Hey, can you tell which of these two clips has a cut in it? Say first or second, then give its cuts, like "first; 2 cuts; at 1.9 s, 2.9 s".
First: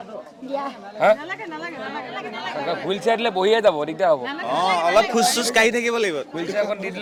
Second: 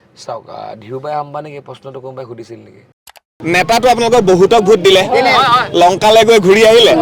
second; 1 cut; at 3.3 s